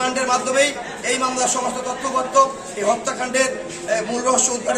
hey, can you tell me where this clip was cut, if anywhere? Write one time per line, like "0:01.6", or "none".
none

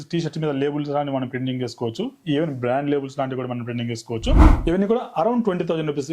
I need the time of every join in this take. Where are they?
0:04.5

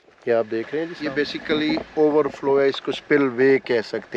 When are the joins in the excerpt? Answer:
0:00.9

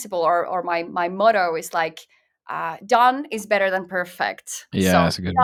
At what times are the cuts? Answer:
none

